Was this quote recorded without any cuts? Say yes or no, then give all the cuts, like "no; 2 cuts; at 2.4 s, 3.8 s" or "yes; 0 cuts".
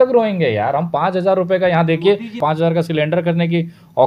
no; 1 cut; at 2.4 s